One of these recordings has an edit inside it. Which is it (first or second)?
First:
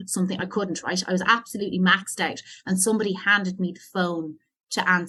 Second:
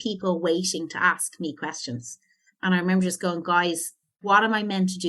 second